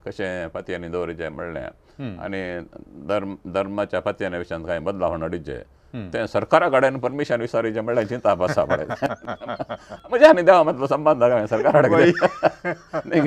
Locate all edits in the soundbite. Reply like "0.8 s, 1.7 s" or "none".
none